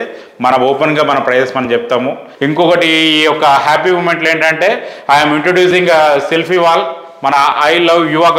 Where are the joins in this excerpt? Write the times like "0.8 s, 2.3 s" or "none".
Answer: 2.3 s